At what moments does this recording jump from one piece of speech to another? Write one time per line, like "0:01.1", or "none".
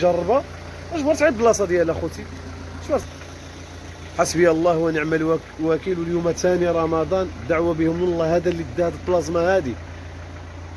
0:03.0